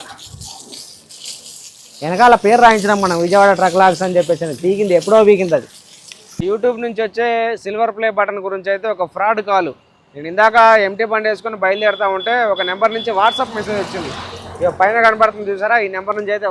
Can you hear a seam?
yes; 1 cut; at 6.4 s

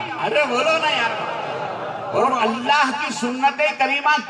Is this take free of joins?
no; 1 cut; at 2.2 s

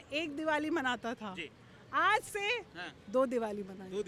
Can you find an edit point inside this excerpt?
no; 0 cuts

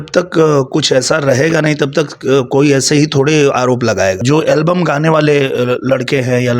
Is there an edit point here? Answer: yes; 1 cut; at 4.2 s

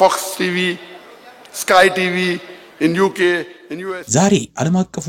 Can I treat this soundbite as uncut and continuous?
no; 1 cut; at 3.8 s

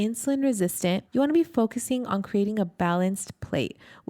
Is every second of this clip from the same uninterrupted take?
no; 1 cut; at 1.0 s

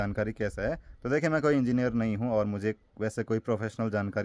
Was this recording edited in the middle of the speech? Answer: no; 0 cuts

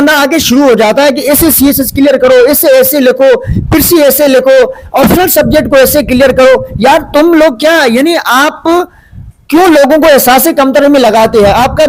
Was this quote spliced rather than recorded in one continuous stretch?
no; 0 cuts

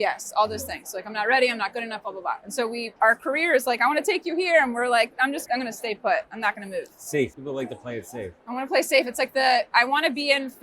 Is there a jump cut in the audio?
yes; 3 cuts; at 2.9 s, 5.4 s, 7.4 s

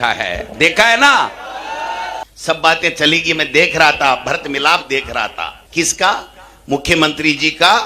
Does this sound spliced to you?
yes; 1 cut; at 2.2 s

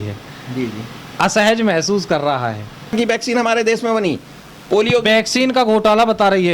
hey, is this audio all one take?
no; 1 cut; at 2.9 s

